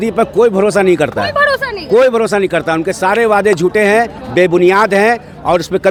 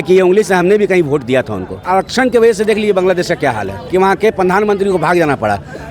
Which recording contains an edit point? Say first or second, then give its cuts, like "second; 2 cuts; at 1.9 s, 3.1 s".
second; 2 cuts; at 1.8 s, 3.8 s